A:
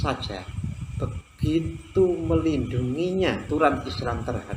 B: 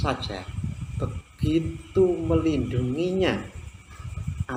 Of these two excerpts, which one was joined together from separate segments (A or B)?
A